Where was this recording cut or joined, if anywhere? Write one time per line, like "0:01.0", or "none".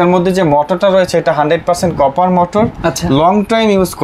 none